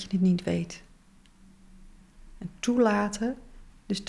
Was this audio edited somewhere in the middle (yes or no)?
no